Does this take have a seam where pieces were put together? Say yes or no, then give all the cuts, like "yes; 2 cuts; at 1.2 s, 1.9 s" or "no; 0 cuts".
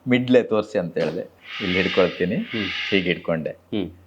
yes; 1 cut; at 1.3 s